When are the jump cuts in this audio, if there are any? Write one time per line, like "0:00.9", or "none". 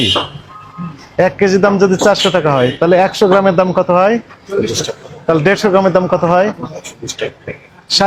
none

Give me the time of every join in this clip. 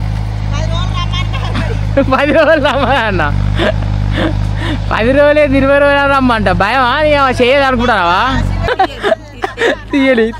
0:08.5

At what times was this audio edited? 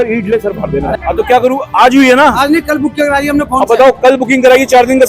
0:01.0

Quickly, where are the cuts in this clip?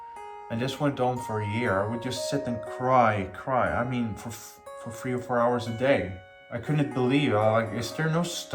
none

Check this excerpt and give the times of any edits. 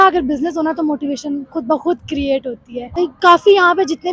0:03.0

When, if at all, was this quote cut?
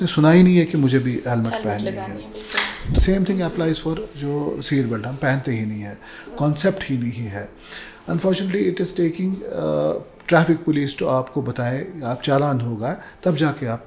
0:03.0

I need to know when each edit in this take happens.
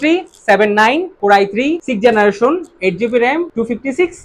none

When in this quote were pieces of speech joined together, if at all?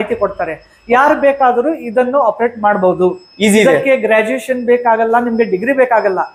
none

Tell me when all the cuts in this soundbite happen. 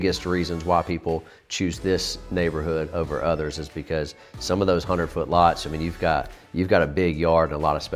none

